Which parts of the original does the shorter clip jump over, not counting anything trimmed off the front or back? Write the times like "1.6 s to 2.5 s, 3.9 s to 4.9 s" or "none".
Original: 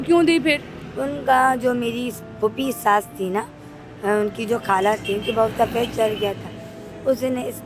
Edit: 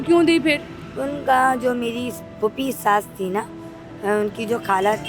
none

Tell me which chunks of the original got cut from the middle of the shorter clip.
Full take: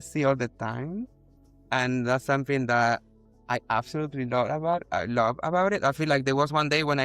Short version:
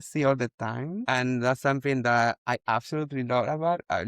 1.0 s to 1.6 s, 3.0 s to 3.4 s

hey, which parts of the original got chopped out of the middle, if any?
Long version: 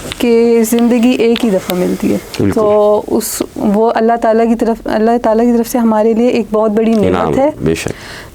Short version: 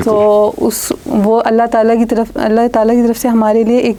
none

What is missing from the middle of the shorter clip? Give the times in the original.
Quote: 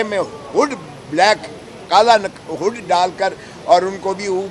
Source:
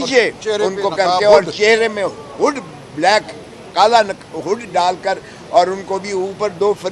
none

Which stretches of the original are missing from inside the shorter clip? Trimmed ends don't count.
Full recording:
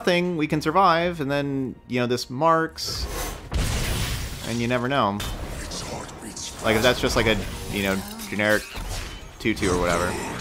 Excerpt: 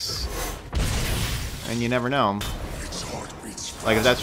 none

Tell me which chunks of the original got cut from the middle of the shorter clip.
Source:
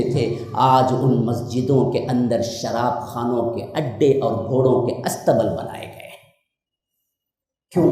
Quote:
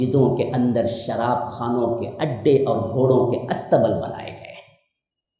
none

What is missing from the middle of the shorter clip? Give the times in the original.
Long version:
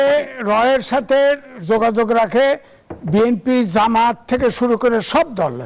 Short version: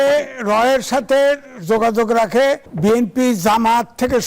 2.7 s to 3.0 s

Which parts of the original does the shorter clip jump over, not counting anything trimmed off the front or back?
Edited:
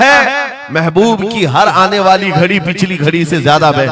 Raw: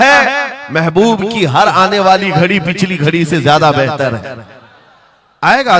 none

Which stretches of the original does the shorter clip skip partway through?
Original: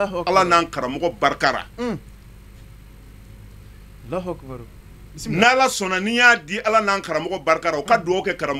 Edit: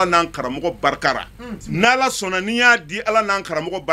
1.7 s to 4.9 s

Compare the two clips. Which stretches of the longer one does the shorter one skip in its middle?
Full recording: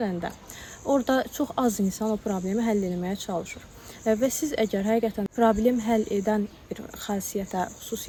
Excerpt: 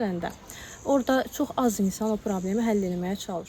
none

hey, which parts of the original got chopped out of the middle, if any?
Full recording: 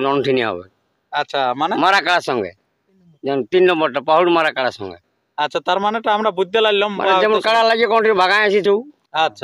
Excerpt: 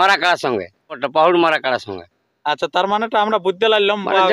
2.9 s to 4.0 s

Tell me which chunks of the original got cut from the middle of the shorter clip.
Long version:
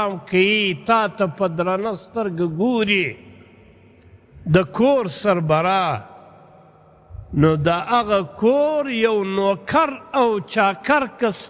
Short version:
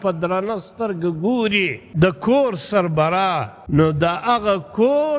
3.2 s to 4.3 s, 6.1 s to 7.2 s

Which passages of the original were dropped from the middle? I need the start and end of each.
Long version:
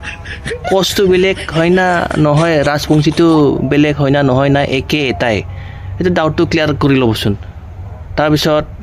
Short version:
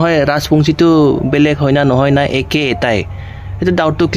none

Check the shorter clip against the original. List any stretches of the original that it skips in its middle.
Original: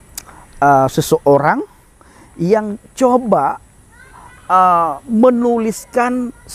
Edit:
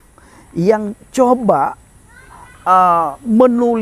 none

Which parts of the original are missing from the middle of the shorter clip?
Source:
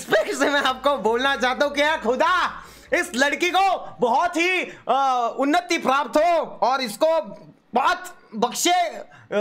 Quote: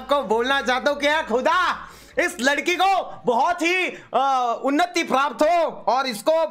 none

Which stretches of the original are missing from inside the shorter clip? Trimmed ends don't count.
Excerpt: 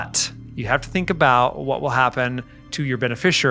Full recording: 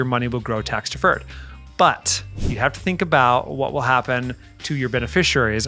none

